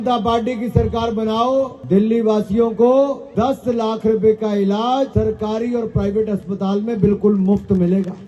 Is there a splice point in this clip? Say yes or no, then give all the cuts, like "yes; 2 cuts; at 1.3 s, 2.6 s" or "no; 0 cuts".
yes; 3 cuts; at 1.8 s, 3.2 s, 5.1 s